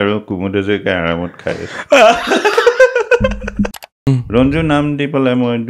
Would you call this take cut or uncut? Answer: cut